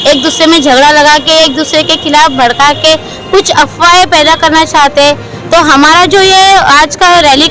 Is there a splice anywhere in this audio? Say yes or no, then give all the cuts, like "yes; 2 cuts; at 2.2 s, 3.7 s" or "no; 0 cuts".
no; 0 cuts